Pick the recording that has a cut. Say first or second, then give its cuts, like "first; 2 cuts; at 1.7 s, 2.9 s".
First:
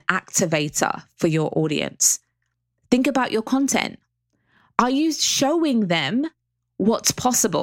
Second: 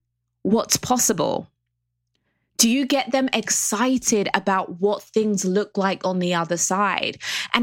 first; 1 cut; at 1.0 s